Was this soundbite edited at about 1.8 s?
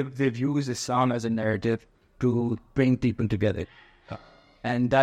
no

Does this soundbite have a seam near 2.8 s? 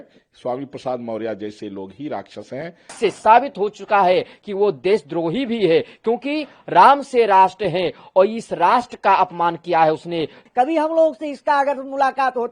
yes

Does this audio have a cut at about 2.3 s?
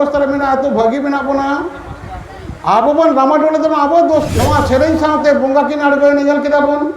no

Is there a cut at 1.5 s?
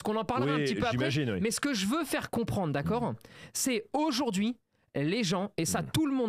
no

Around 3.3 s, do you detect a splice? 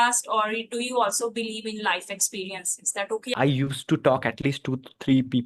yes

